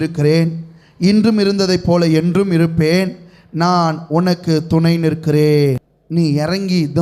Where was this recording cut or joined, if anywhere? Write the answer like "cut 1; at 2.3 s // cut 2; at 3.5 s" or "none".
cut 1; at 5.9 s